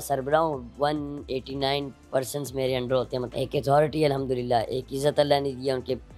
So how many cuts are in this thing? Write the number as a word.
one